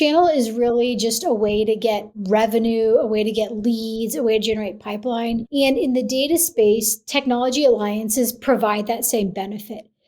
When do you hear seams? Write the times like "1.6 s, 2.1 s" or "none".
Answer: 2.2 s, 5.5 s